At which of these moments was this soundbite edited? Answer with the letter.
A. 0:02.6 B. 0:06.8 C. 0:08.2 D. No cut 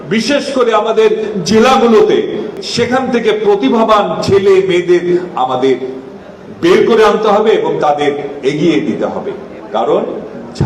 A